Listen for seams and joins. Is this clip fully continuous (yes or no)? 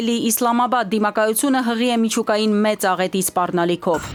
yes